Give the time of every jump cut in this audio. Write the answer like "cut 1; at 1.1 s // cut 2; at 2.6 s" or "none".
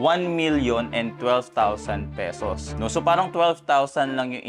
cut 1; at 2.7 s